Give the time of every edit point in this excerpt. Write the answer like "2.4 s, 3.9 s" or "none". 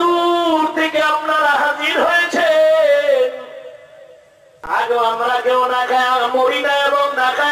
4.6 s